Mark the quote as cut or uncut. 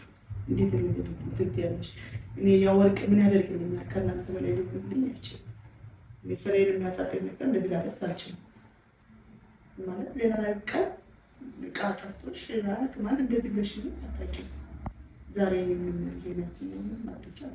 uncut